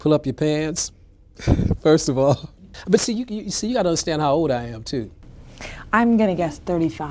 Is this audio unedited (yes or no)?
yes